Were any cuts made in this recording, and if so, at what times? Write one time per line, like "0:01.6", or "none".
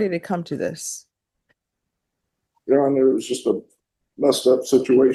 none